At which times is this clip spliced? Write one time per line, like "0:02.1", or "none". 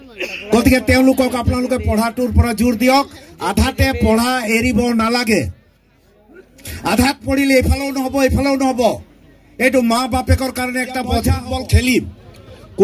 0:11.4